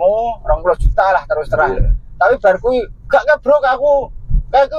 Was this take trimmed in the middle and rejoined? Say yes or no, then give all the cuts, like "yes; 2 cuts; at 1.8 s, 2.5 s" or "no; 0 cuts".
no; 0 cuts